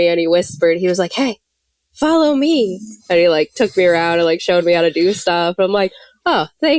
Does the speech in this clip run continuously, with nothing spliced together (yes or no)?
yes